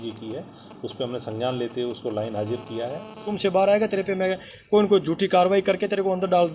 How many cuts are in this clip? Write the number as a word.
one